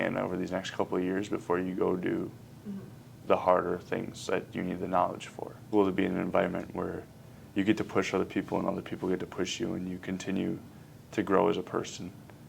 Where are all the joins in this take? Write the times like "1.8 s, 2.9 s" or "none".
5.6 s